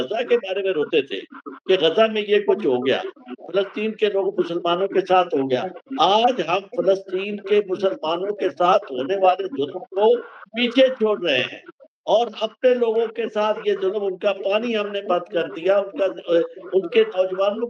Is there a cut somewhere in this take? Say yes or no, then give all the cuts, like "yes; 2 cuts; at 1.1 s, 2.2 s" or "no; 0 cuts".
no; 0 cuts